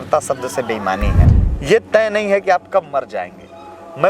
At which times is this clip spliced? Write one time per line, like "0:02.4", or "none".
0:01.2